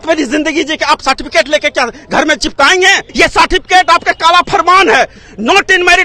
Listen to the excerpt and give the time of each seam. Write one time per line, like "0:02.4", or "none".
0:03.0